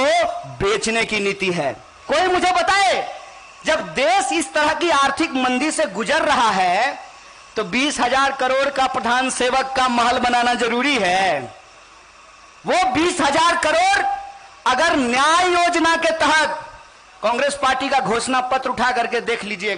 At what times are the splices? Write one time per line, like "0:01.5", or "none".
0:01.9